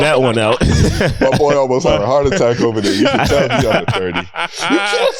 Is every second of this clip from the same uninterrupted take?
yes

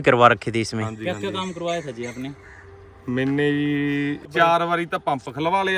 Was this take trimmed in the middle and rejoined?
yes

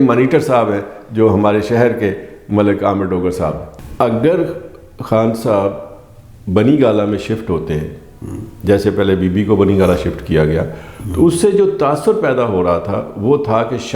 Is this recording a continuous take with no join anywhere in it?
no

